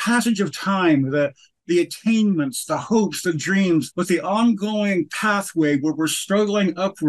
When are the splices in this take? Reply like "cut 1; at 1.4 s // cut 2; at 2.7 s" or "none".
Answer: cut 1; at 3.9 s